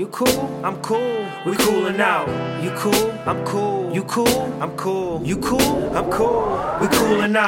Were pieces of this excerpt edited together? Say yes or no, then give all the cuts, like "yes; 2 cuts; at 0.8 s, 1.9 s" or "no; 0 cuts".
no; 0 cuts